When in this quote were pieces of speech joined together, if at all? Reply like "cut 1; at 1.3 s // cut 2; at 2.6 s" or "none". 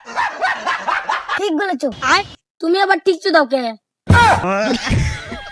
cut 1; at 4.0 s

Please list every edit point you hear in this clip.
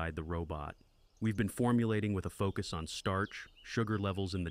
none

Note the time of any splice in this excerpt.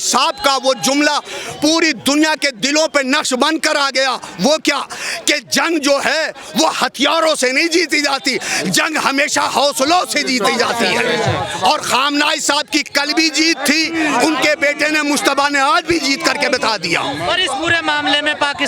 none

